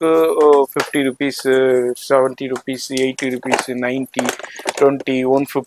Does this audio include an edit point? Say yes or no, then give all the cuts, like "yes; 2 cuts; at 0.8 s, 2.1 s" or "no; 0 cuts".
no; 0 cuts